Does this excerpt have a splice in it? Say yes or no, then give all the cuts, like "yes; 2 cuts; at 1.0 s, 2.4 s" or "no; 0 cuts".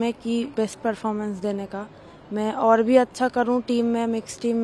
no; 0 cuts